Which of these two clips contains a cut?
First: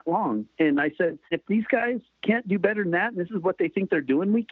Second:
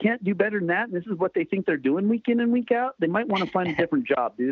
first; 1 cut; at 1.3 s

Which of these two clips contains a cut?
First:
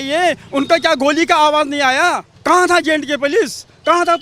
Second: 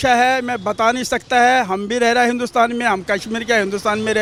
first; 1 cut; at 2.3 s

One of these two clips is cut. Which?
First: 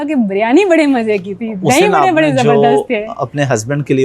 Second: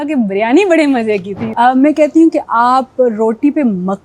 second; 1 cut; at 1.4 s

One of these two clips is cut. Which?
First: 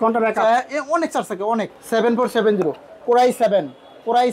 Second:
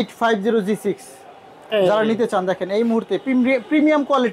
first; 1 cut; at 1.8 s

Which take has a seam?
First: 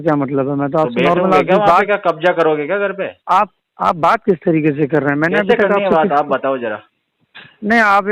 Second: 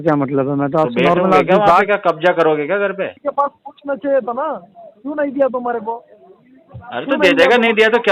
second; 1 cut; at 3.2 s

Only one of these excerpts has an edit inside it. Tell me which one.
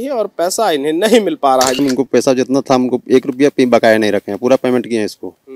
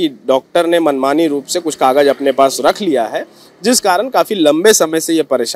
first; 1 cut; at 1.8 s

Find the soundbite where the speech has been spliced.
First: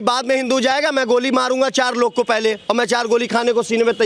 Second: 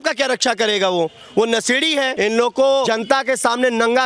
second; 2 cuts; at 2.1 s, 2.9 s

